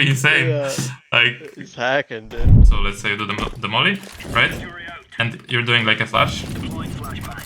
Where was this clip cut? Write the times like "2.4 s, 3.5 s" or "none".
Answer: 2.6 s